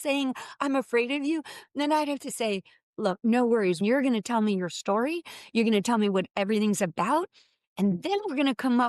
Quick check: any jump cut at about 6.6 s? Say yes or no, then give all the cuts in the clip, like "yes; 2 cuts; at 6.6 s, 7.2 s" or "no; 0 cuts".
no; 1 cut; at 3.8 s